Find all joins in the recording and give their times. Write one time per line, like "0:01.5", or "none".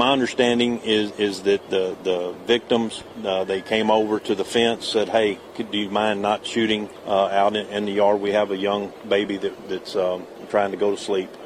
0:06.9
0:10.3